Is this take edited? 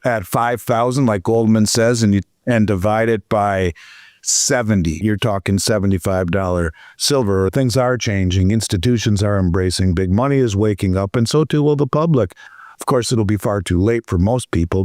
yes; 2 cuts; at 5.0 s, 7.5 s

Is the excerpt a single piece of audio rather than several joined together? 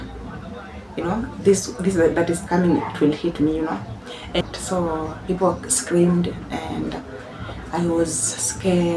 no; 1 cut; at 4.4 s

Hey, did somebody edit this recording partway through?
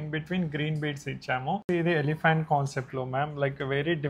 yes; 1 cut; at 1.6 s

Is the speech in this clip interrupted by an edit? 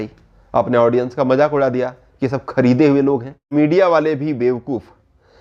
yes; 1 cut; at 3.5 s

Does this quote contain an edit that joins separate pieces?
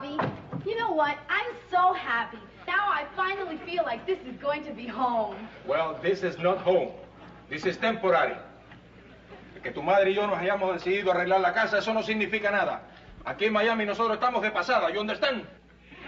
yes; 1 cut; at 9.3 s

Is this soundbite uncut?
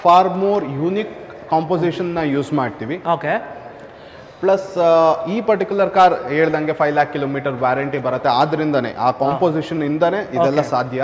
yes; 0 cuts

